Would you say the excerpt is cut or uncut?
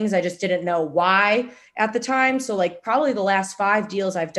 uncut